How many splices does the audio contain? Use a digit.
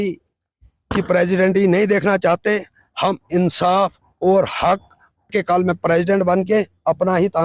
1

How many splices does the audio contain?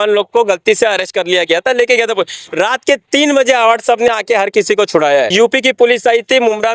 1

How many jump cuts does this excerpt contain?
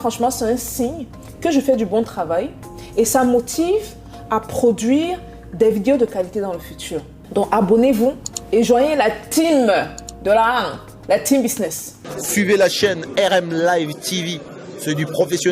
1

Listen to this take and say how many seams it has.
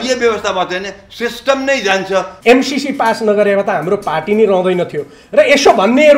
1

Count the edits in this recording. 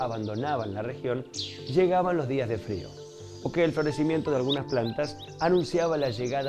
1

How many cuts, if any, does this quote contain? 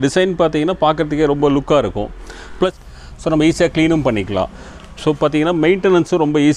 1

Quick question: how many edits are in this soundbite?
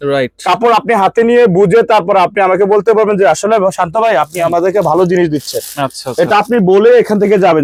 0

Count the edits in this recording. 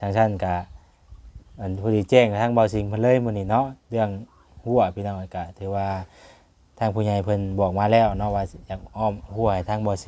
0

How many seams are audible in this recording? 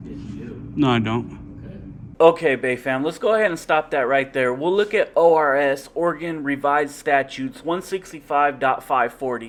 0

